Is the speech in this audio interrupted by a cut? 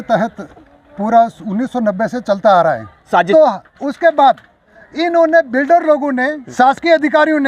yes; 2 cuts; at 3.3 s, 6.4 s

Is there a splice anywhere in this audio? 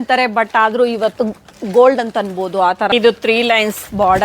yes; 1 cut; at 2.9 s

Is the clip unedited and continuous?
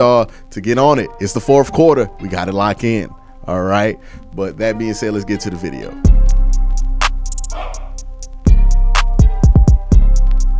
no; 1 cut; at 5.9 s

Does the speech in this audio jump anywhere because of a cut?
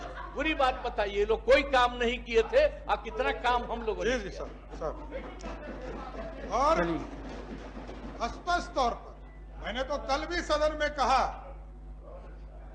no; 0 cuts

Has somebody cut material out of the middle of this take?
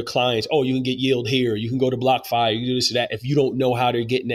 no; 0 cuts

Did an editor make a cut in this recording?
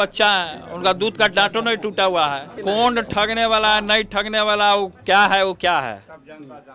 yes; 1 cut; at 2.5 s

